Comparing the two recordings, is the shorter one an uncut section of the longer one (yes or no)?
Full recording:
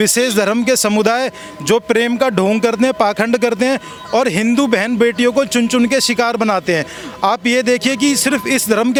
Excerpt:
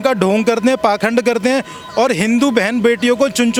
yes